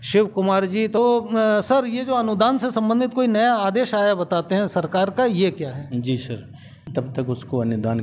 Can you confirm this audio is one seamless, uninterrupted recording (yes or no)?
no